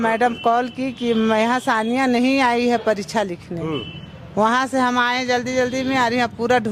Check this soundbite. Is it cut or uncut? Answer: uncut